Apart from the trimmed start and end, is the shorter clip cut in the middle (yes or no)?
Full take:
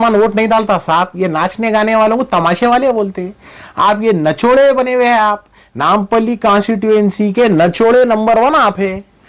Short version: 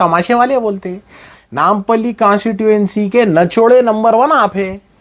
yes